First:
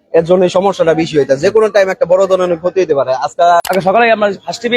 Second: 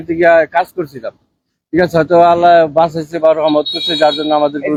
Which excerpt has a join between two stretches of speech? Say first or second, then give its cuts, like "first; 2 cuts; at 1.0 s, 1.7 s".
first; 1 cut; at 3.6 s